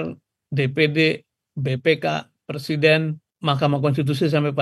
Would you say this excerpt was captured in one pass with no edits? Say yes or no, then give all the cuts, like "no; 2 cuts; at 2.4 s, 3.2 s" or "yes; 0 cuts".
no; 1 cut; at 3.2 s